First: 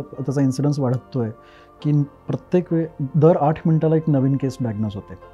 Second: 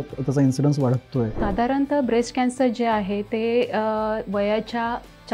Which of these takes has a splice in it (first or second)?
second